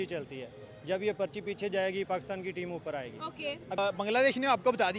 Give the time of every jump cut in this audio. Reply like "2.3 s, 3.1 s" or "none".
3.8 s